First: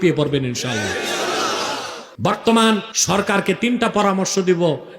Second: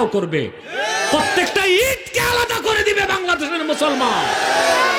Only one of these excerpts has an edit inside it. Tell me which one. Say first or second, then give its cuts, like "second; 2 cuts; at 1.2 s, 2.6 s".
first; 2 cuts; at 2.0 s, 2.9 s